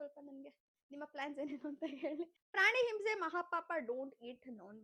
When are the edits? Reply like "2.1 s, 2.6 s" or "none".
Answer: 2.4 s